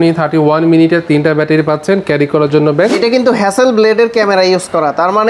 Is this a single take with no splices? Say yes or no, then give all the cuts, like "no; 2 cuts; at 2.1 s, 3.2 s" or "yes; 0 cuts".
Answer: no; 1 cut; at 2.9 s